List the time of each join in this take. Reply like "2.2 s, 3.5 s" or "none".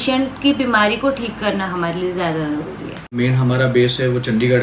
3.1 s